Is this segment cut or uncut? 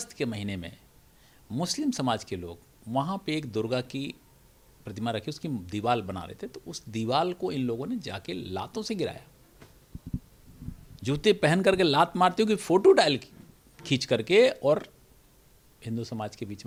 uncut